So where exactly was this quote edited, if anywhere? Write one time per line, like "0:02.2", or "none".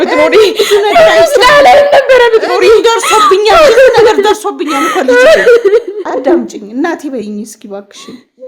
0:06.0